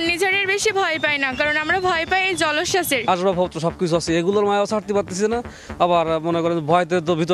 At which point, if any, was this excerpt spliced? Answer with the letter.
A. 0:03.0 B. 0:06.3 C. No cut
A